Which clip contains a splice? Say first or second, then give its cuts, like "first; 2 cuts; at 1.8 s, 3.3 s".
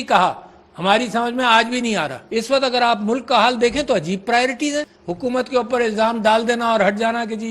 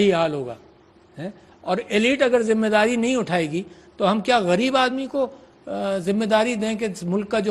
first; 2 cuts; at 2.2 s, 5.0 s